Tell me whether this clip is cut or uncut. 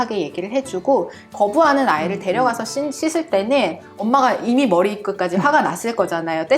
cut